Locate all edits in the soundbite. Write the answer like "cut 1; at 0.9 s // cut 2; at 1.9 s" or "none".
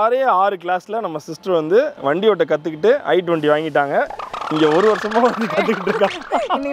none